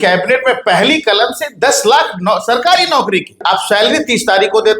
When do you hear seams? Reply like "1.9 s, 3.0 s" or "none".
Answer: 3.4 s